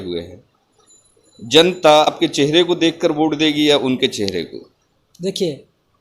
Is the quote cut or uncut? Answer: cut